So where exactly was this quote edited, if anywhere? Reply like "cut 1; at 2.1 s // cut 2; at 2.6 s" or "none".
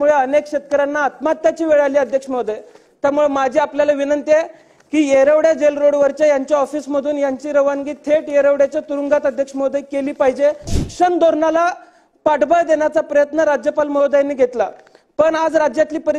cut 1; at 10.8 s